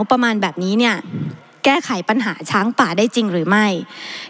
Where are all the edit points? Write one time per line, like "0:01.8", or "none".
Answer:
none